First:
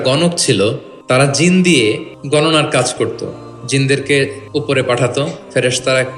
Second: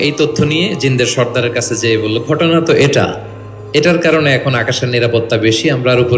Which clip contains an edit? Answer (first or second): first